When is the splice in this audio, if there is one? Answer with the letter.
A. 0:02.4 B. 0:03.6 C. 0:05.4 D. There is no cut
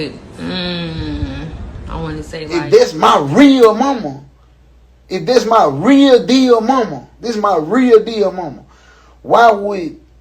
A